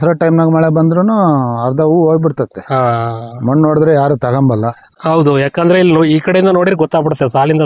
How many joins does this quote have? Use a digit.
1